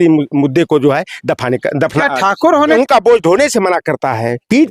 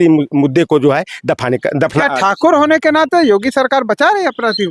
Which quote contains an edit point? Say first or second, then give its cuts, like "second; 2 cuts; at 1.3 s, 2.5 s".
first; 1 cut; at 2.8 s